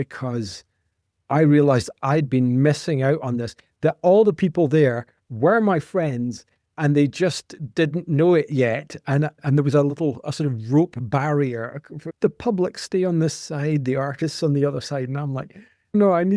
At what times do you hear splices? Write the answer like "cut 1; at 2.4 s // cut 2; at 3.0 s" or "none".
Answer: none